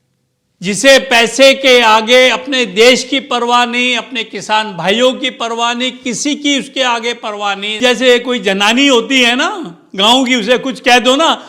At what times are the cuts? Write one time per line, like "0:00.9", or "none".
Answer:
0:07.8